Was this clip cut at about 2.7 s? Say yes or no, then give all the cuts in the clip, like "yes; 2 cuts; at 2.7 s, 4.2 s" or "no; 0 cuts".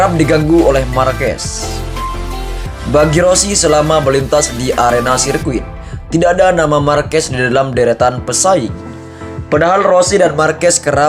yes; 2 cuts; at 1.4 s, 2.7 s